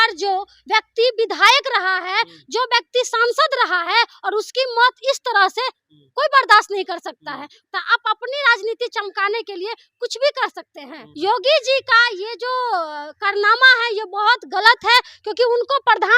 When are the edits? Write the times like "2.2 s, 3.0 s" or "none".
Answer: 7.5 s, 11.0 s